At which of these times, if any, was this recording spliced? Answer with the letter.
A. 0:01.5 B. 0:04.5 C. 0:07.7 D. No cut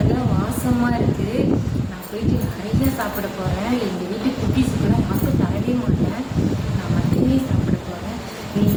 D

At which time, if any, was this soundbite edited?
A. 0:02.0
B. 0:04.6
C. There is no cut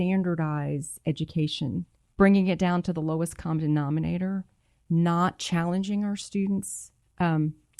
A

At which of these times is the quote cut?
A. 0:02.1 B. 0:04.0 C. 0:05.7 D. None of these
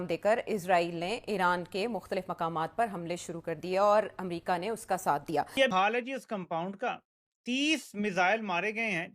C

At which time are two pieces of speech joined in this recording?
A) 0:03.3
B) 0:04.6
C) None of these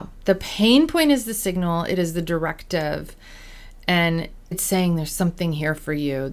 B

